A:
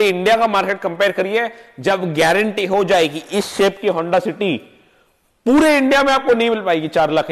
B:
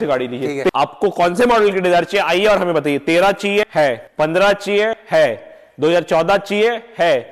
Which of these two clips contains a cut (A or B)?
B